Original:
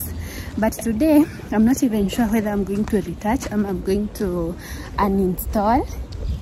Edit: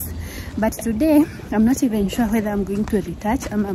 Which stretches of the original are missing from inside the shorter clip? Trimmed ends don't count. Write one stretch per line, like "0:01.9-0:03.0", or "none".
none